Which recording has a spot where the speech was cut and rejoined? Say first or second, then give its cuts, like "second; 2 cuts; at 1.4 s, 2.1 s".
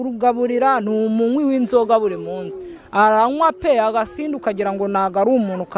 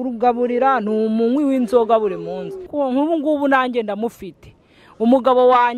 second; 1 cut; at 2.7 s